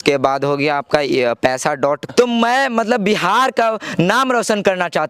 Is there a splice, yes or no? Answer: yes